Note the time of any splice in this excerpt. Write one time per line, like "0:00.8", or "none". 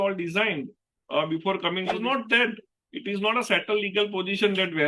0:01.9